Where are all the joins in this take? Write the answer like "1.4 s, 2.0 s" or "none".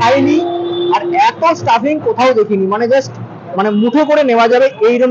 none